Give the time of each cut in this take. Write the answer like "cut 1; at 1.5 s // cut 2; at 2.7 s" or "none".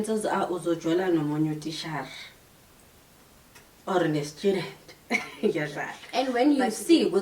cut 1; at 6.0 s

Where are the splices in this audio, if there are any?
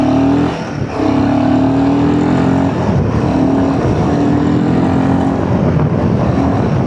none

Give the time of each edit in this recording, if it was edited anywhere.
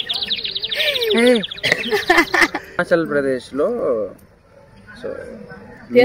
cut 1; at 2.8 s

